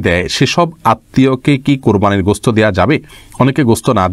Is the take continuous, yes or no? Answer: yes